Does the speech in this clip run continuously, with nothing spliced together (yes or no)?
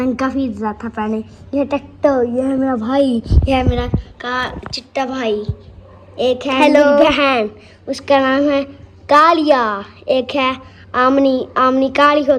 yes